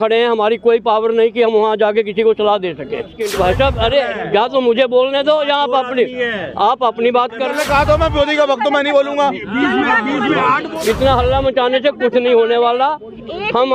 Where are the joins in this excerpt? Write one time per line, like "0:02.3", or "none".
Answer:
0:03.2
0:07.5
0:10.7